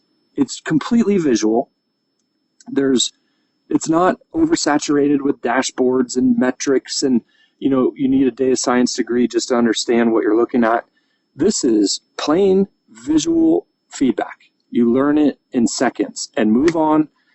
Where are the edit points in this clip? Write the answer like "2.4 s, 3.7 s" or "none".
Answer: none